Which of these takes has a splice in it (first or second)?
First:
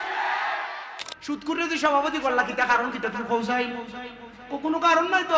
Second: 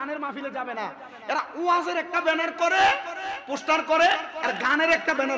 first